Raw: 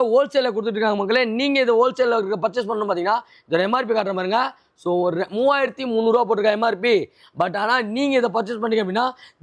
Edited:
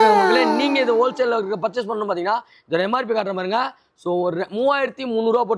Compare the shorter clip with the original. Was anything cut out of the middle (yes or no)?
no